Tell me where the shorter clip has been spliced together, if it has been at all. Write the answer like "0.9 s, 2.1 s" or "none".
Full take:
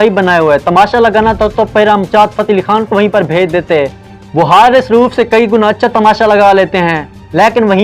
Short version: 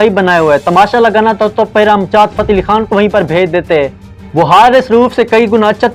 none